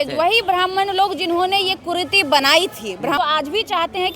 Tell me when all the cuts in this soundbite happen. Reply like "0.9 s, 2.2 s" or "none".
3.2 s